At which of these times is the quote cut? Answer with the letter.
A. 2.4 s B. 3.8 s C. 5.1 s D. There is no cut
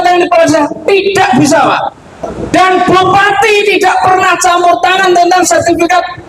A